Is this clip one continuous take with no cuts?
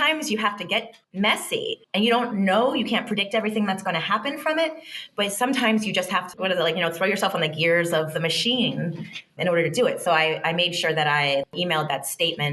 yes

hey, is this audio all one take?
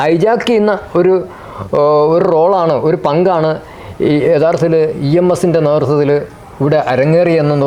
yes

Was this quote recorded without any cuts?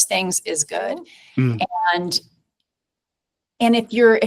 no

